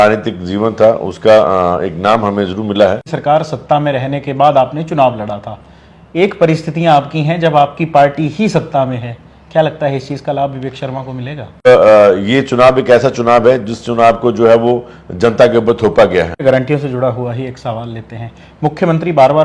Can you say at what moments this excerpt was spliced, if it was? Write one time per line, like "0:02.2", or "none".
0:03.1
0:11.7
0:16.4